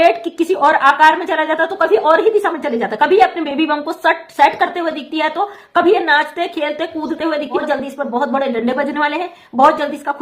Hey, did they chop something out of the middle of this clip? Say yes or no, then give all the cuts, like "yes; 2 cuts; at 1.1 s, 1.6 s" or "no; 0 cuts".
yes; 1 cut; at 7.6 s